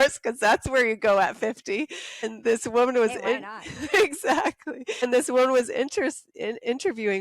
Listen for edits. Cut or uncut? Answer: cut